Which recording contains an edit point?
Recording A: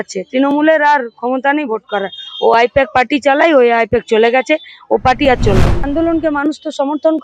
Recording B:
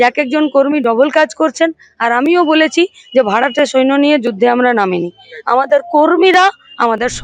A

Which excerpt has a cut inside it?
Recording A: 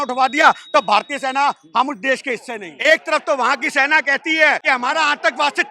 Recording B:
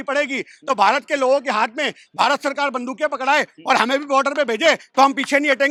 A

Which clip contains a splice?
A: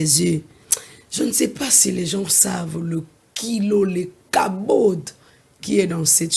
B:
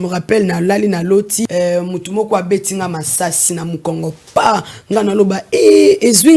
B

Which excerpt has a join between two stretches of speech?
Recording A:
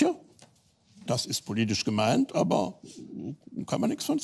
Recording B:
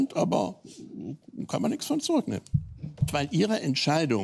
B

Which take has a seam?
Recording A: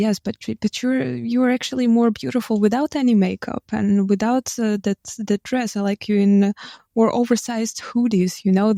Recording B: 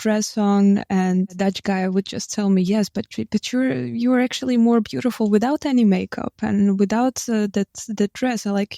B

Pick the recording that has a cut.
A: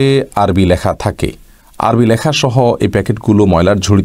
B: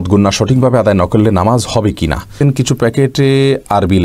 B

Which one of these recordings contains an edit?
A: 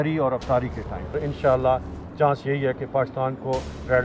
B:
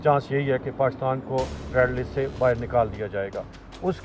A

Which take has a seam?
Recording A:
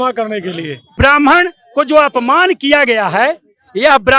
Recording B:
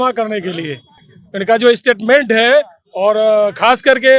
A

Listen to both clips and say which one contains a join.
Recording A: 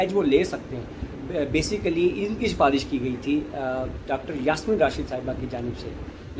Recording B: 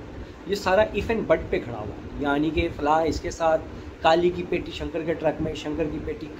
A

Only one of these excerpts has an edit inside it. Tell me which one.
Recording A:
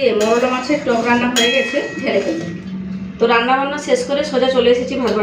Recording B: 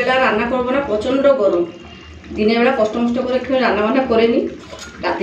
A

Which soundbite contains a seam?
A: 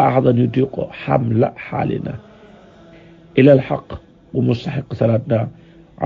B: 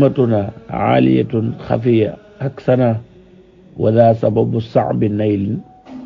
A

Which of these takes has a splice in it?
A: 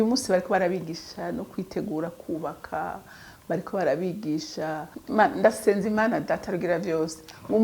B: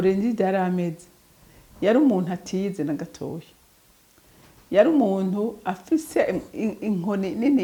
A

